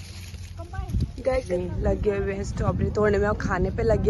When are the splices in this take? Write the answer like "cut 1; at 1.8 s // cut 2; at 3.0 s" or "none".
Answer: cut 1; at 1.6 s